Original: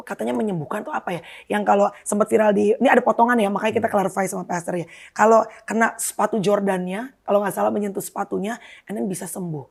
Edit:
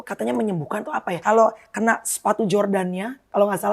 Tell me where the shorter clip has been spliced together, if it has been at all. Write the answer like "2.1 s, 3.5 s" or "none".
1.2 s